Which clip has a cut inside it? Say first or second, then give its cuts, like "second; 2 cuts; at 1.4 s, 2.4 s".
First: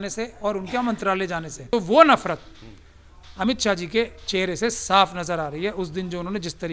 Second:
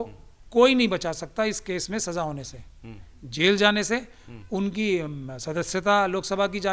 first; 1 cut; at 1.5 s